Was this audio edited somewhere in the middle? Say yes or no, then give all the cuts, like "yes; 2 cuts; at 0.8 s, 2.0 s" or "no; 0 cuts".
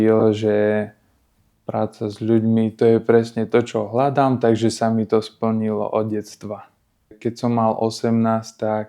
yes; 1 cut; at 7.2 s